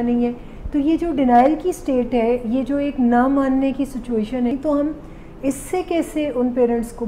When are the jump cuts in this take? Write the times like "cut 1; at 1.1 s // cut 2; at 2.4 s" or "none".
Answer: cut 1; at 4.5 s